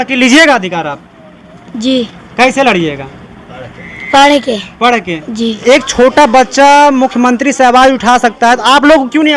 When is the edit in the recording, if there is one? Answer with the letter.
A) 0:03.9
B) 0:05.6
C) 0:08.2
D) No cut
B